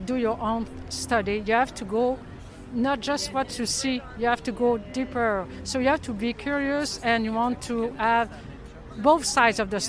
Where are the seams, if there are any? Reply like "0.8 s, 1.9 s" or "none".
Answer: none